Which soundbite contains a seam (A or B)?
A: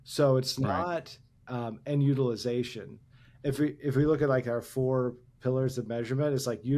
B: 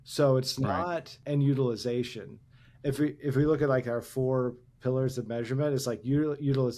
B